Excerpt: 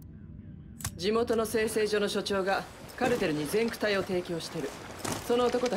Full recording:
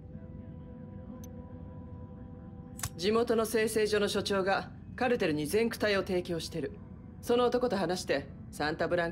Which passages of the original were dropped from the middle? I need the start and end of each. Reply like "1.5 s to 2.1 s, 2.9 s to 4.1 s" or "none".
1.0 s to 3.0 s